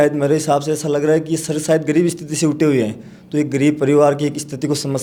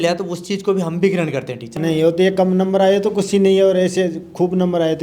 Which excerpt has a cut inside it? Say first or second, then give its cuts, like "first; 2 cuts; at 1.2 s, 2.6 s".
second; 1 cut; at 1.7 s